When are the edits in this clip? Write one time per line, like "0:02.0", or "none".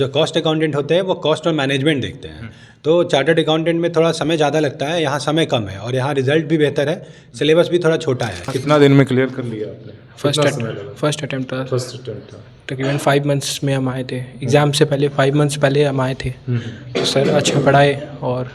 0:08.5